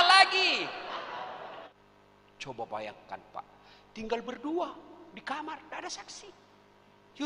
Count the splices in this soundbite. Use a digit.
1